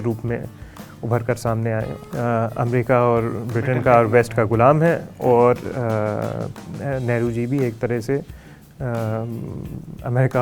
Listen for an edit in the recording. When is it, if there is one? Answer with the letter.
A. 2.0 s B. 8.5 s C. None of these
A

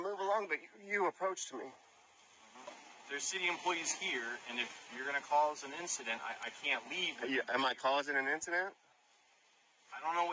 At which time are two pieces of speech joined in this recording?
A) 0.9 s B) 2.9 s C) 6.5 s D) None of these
B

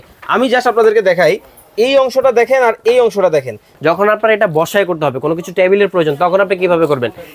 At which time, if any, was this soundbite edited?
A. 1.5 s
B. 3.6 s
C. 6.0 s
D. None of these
B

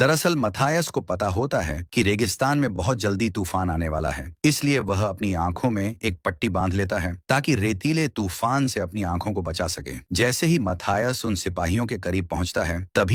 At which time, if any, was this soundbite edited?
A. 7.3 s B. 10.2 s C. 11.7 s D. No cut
D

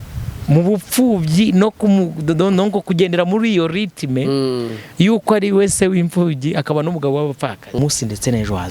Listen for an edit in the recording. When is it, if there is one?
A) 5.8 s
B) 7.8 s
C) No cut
B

